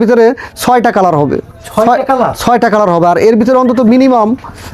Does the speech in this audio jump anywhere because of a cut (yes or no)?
no